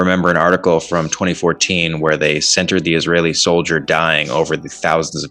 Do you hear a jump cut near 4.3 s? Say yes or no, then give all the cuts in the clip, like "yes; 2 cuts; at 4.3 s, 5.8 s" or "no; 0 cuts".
no; 0 cuts